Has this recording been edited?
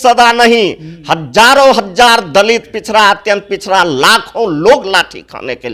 no; 0 cuts

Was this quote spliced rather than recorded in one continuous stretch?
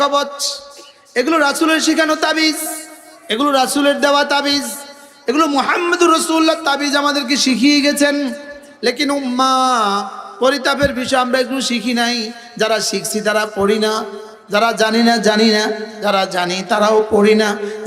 no; 0 cuts

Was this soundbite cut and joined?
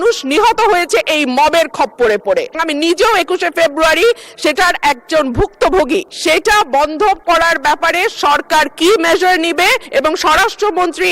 yes; 3 cuts; at 2.6 s, 6.1 s, 9.8 s

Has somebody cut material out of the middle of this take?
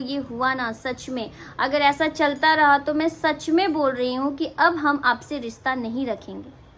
no; 0 cuts

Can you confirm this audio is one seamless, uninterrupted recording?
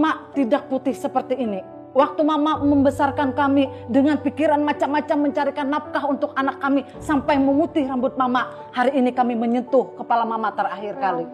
yes; 0 cuts

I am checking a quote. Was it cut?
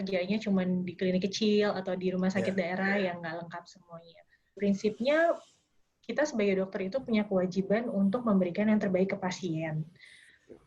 yes; 1 cut; at 4.6 s

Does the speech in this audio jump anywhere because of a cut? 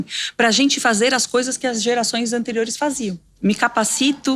yes; 1 cut; at 3.4 s

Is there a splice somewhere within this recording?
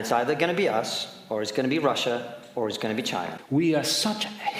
yes; 1 cut; at 3.4 s

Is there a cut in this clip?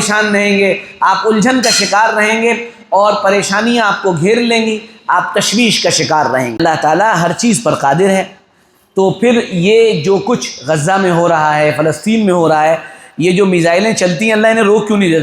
yes; 1 cut; at 6.6 s

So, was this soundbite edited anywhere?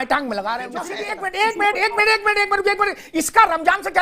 yes; 1 cut; at 1.0 s

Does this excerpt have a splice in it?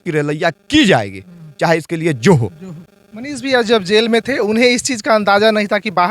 no; 0 cuts

